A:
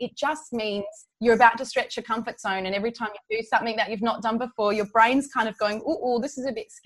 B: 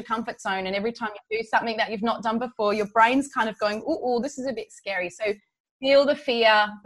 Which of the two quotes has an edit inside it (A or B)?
A